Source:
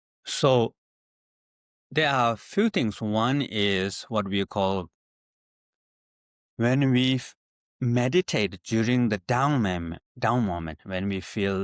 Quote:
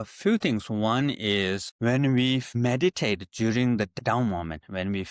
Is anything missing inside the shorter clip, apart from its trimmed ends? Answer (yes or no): yes